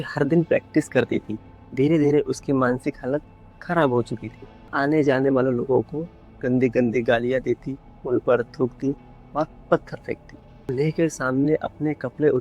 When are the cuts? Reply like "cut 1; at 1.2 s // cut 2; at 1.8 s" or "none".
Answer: cut 1; at 4.7 s // cut 2; at 10.7 s